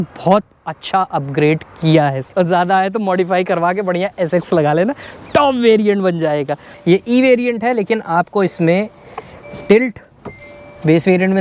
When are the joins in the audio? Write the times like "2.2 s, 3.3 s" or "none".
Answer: 2.2 s, 6.6 s